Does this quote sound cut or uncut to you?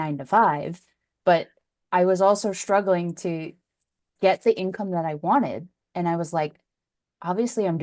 cut